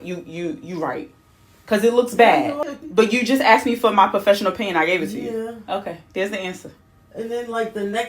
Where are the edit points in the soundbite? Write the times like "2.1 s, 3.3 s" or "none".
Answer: 2.6 s